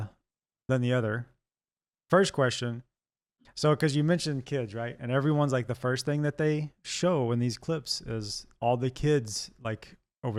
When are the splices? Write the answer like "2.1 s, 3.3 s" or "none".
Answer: none